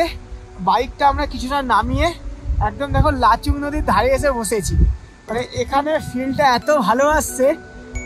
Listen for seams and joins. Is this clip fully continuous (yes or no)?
yes